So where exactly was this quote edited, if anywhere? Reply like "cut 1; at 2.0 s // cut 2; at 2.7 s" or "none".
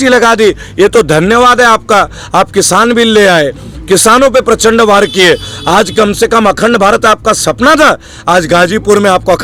none